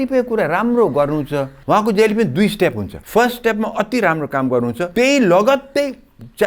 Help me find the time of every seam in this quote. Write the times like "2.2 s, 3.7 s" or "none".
1.5 s, 2.9 s, 4.8 s